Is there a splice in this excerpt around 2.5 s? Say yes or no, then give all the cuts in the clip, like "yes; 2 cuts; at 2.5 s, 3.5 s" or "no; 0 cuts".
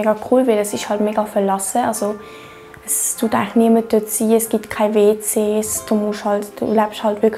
no; 0 cuts